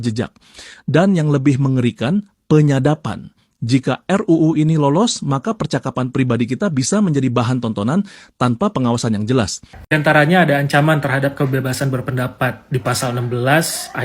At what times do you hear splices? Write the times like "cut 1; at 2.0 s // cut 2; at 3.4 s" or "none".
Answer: cut 1; at 9.7 s